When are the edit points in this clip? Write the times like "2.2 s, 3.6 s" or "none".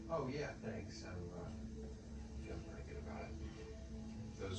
none